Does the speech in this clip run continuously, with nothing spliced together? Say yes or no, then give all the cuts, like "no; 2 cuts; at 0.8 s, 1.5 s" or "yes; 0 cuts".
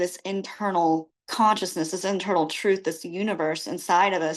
no; 1 cut; at 1.2 s